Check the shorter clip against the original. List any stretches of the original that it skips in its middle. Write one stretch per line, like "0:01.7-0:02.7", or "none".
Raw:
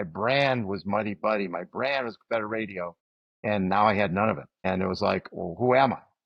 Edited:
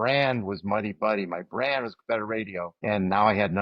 0:02.9-0:03.3